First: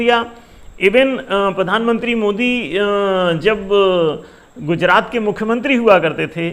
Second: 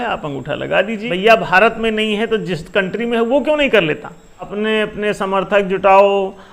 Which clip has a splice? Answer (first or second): second